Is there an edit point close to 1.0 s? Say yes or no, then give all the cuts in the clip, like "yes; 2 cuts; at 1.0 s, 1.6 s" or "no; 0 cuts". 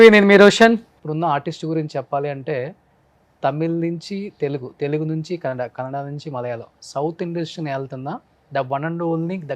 yes; 1 cut; at 1.0 s